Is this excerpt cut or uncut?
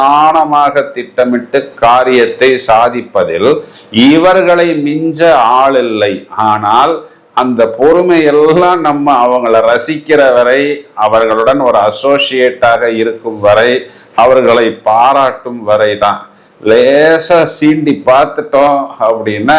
uncut